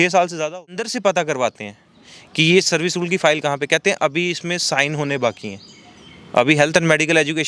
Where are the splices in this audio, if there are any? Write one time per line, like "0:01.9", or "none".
0:00.9